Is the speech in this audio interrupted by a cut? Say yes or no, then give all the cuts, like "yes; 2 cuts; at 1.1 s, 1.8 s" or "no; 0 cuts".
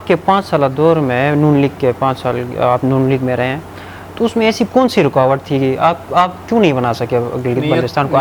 no; 0 cuts